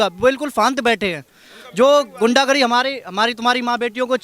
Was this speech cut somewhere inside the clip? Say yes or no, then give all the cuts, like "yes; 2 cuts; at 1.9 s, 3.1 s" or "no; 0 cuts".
no; 0 cuts